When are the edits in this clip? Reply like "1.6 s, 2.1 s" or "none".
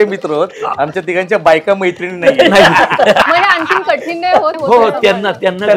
3.2 s, 4.6 s